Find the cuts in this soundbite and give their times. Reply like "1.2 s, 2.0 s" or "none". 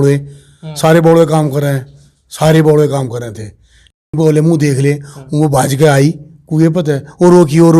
4.1 s